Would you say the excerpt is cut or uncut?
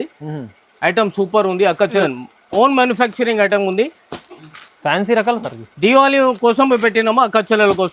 cut